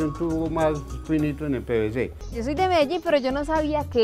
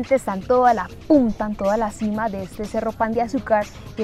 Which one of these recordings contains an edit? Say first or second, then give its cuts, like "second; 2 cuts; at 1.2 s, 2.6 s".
first; 1 cut; at 2.2 s